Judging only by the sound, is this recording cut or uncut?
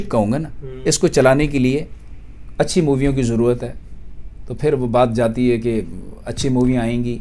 uncut